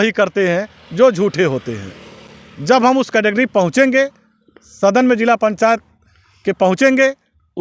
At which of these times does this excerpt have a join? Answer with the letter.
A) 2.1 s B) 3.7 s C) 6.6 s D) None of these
D